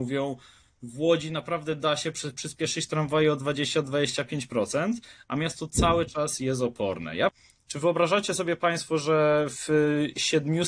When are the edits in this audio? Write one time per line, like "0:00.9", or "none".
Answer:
0:07.4